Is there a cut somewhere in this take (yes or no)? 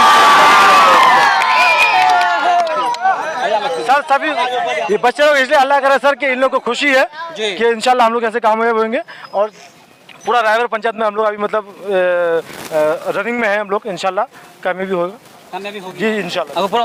no